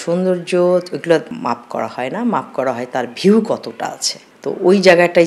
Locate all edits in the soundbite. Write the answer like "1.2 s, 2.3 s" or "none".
none

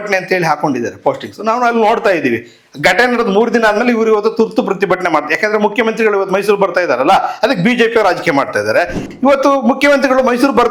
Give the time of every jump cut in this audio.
none

